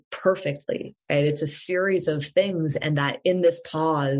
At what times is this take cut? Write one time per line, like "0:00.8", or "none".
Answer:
none